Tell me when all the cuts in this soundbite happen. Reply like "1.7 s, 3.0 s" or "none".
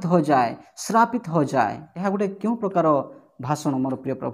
1.9 s